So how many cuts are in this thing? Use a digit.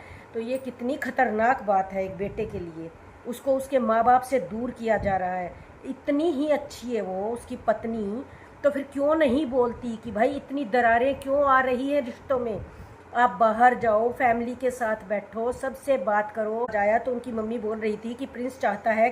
1